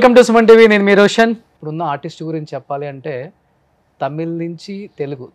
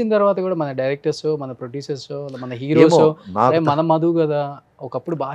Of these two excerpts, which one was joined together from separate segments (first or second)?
first